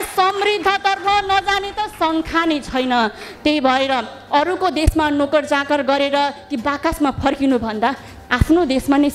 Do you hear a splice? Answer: no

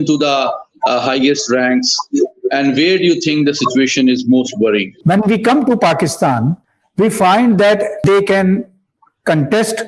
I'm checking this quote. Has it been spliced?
yes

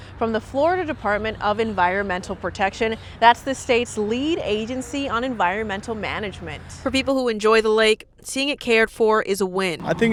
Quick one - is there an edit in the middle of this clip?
no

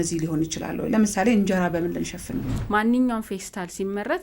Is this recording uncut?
no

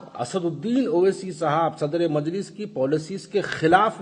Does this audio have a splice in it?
no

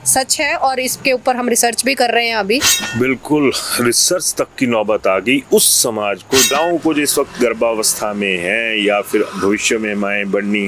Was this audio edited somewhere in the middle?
yes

